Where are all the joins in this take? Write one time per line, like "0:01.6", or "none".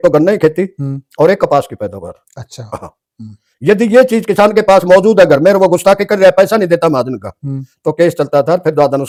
none

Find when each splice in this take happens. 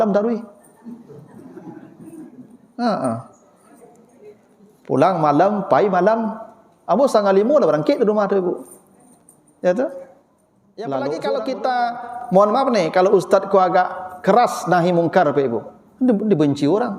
0:11.0

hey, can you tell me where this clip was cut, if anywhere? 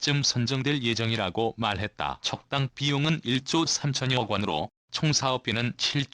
0:02.2
0:05.0

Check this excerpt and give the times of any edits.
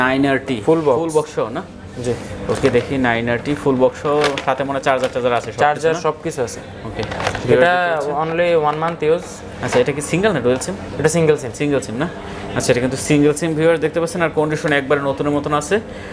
none

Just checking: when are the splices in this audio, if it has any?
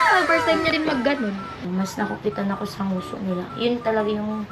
0:01.6

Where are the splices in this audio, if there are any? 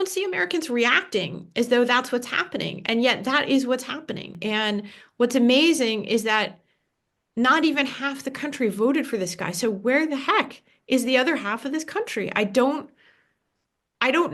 0:04.3

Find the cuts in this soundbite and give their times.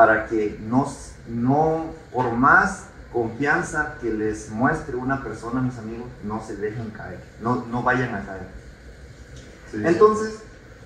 none

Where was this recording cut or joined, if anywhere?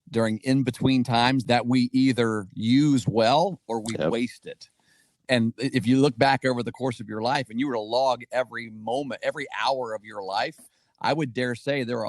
0:01.4
0:05.3

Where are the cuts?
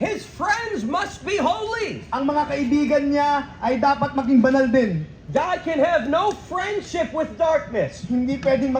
none

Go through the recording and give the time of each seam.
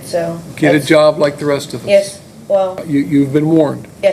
0:02.8

